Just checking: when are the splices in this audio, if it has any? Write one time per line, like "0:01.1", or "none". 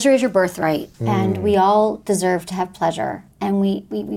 0:00.9
0:03.3